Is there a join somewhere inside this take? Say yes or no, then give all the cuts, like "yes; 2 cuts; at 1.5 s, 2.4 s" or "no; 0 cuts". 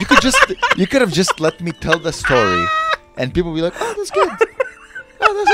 no; 0 cuts